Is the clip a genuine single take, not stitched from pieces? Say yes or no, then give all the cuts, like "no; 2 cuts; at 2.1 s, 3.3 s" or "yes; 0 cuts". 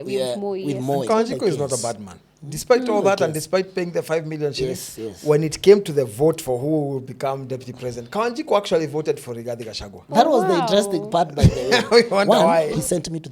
no; 2 cuts; at 1.1 s, 12.3 s